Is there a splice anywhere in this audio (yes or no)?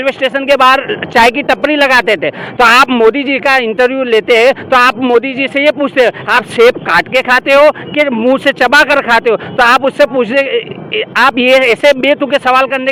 no